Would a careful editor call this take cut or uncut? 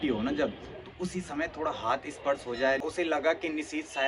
cut